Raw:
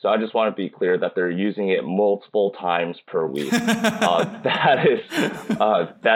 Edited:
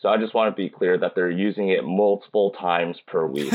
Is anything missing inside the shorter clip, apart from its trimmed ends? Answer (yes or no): no